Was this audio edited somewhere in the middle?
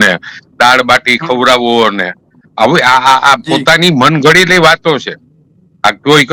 no; 0 cuts

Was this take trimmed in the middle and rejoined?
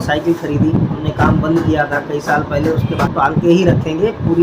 yes; 2 cuts; at 1.0 s, 3.0 s

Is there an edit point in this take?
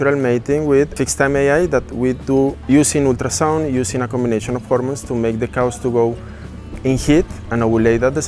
yes; 2 cuts; at 0.9 s, 2.6 s

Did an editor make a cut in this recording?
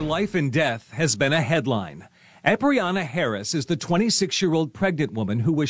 no; 0 cuts

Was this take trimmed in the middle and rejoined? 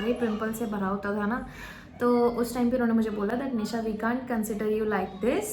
no; 0 cuts

